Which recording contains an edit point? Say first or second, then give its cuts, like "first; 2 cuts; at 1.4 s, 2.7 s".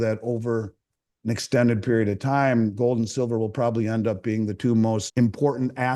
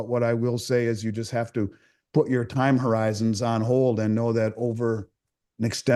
first; 1 cut; at 5.1 s